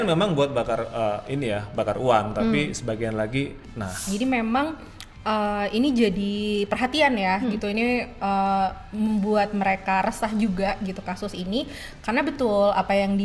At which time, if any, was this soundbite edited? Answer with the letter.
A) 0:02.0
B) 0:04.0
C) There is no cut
B